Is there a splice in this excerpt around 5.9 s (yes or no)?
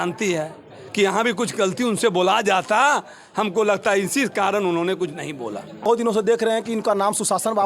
yes